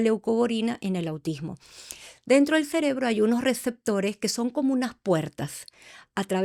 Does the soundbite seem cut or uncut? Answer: uncut